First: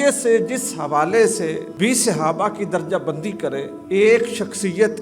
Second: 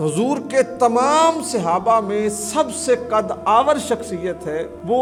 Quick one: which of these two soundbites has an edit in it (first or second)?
first